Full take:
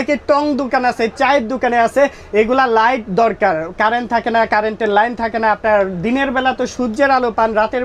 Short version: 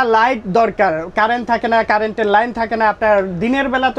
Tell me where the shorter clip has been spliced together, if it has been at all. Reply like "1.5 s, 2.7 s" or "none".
none